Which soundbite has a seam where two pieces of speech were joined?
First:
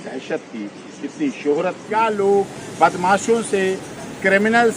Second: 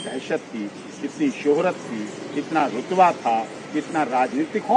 first; 1 cut; at 1.8 s

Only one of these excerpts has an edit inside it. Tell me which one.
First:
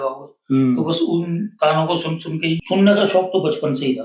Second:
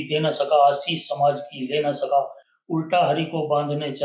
first; 1 cut; at 2.6 s

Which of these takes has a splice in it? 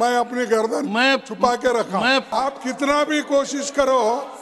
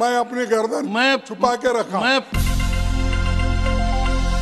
first; 1 cut; at 2.3 s

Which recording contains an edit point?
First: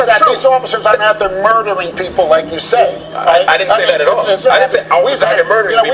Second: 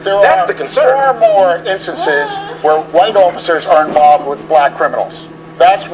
second; 1 cut; at 5.0 s

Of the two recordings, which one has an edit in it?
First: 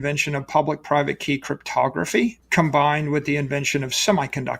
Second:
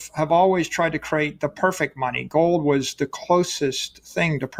first; 1 cut; at 2.4 s

